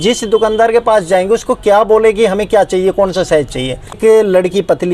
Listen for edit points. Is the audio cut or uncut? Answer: uncut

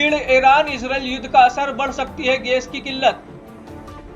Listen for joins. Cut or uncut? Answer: cut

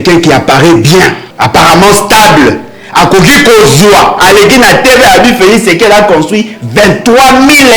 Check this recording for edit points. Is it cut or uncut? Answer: cut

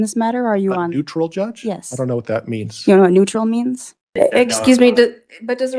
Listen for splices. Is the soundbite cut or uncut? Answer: cut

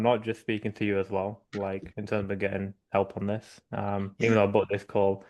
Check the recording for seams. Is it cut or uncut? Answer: uncut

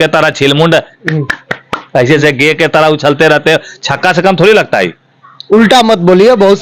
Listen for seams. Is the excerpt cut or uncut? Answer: uncut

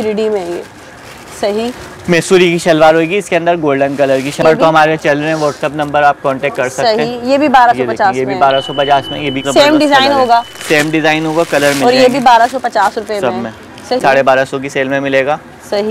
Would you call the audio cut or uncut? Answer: cut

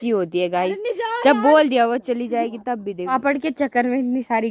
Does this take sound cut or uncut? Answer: cut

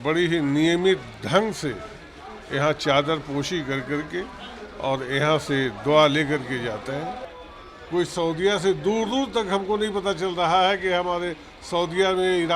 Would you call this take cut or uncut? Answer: cut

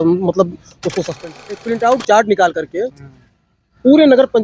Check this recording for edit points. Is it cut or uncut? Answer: cut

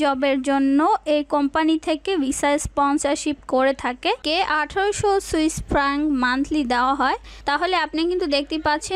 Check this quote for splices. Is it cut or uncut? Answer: cut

